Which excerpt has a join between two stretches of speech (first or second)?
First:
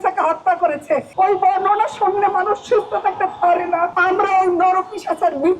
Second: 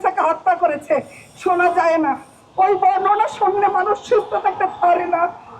first